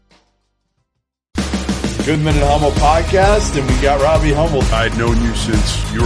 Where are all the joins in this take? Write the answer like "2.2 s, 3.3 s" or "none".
1.4 s